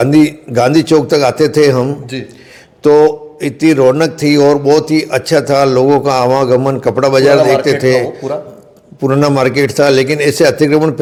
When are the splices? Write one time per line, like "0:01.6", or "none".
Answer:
none